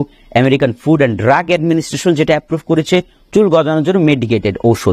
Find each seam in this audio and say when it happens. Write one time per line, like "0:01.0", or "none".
none